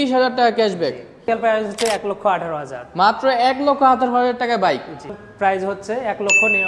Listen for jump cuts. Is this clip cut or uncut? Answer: cut